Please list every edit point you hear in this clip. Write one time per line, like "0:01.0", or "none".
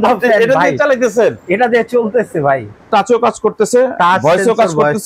0:02.9